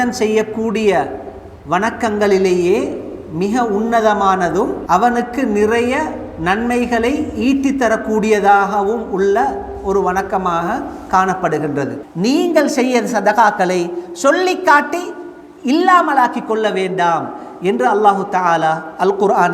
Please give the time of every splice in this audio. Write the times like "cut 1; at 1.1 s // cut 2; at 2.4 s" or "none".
cut 1; at 4.8 s // cut 2; at 12.0 s